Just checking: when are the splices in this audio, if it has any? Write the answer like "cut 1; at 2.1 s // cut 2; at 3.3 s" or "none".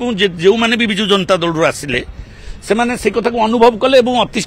none